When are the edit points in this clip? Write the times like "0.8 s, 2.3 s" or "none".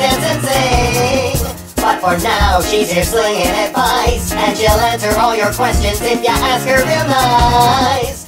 5.8 s